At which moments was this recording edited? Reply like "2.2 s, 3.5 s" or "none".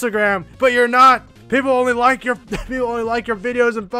1.3 s